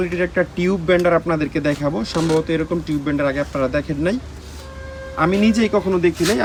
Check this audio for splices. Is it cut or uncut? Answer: uncut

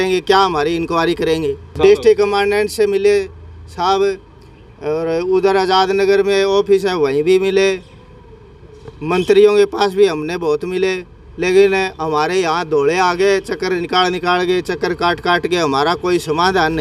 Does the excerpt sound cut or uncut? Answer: cut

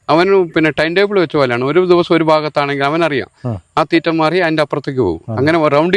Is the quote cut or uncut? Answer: uncut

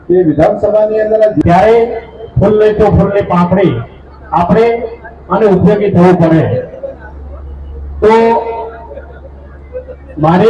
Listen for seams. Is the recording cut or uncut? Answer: cut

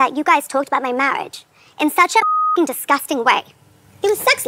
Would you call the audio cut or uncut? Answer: uncut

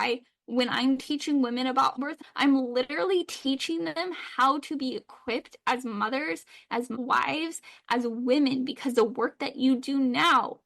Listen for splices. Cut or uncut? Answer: cut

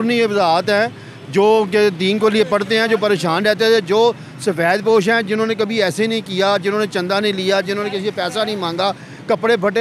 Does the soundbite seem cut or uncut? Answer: uncut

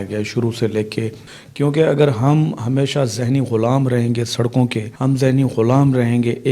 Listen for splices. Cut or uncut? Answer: cut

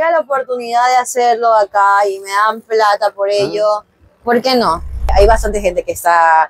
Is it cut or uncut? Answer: cut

